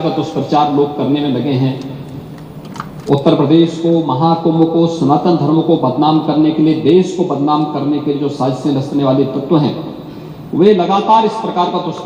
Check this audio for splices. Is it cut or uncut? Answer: uncut